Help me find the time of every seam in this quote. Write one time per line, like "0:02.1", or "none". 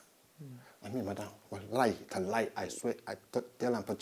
none